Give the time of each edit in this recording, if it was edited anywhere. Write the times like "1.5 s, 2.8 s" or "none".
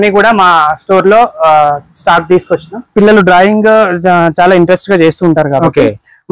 2.9 s